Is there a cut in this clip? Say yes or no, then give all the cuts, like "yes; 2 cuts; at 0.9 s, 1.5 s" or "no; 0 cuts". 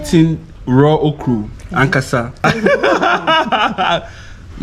yes; 1 cut; at 2.4 s